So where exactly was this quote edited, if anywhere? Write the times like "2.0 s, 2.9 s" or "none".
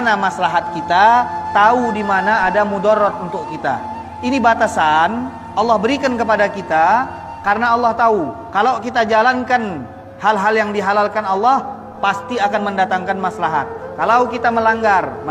none